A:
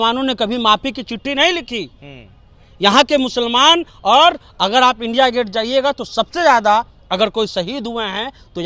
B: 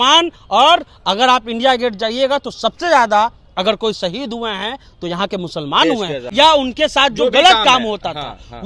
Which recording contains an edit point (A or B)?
B